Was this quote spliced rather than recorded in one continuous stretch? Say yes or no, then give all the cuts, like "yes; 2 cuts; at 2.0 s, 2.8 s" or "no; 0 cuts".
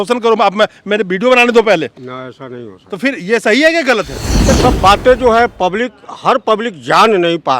yes; 1 cut; at 4.6 s